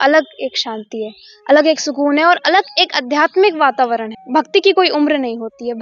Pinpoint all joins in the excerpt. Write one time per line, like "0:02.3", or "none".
0:04.1